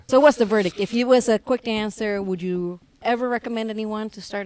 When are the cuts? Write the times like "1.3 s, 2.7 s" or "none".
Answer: none